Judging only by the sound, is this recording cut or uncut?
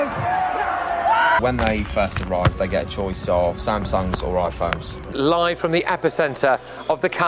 cut